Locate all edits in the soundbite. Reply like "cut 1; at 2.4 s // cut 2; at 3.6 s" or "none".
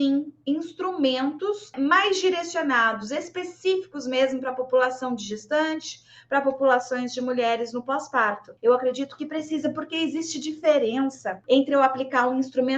cut 1; at 1.7 s // cut 2; at 8.5 s // cut 3; at 11.4 s